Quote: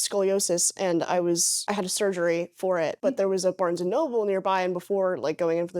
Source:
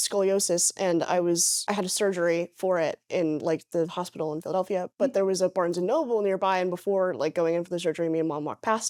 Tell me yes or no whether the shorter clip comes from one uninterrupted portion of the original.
no